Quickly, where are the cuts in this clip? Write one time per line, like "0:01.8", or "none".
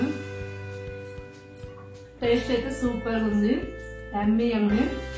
none